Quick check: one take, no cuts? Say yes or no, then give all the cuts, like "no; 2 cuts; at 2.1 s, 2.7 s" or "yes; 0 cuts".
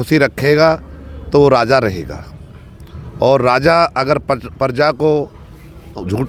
yes; 0 cuts